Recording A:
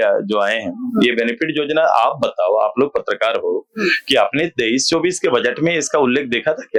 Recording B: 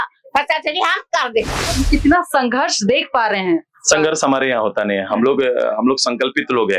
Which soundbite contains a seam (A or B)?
B